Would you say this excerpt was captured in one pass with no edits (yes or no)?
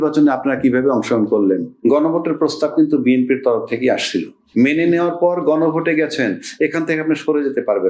no